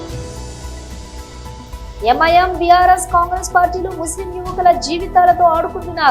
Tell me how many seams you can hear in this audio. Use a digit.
1